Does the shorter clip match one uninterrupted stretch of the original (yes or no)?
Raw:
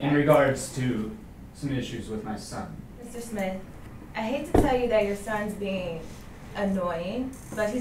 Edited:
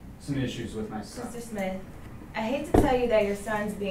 no